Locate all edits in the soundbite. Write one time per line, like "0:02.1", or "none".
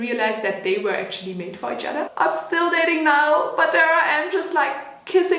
0:02.1